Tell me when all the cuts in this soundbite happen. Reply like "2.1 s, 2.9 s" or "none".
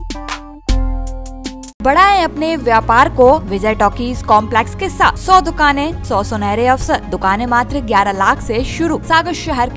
1.8 s, 3.5 s, 5.2 s, 6.0 s, 7.1 s, 9.0 s

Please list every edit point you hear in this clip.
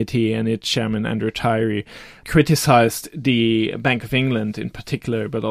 none

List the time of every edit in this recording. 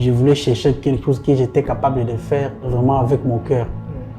2.7 s

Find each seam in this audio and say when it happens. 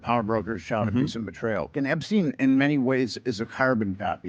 1.7 s

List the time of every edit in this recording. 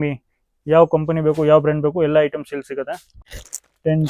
3.1 s

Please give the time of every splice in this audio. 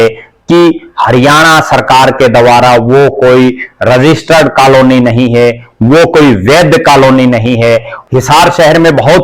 7.9 s

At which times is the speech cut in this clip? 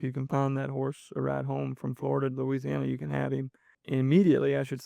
3.7 s

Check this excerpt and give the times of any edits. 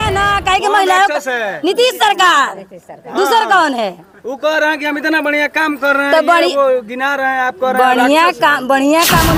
none

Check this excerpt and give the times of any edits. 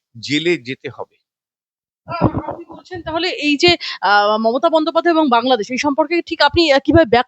none

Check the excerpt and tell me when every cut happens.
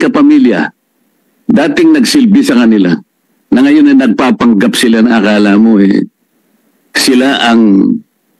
none

